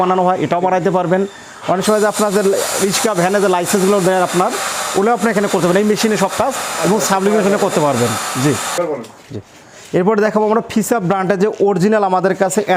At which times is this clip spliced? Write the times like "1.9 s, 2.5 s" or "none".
none